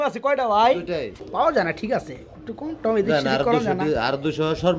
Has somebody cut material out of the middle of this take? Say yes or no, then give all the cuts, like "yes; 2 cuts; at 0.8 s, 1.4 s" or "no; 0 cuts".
yes; 1 cut; at 1.5 s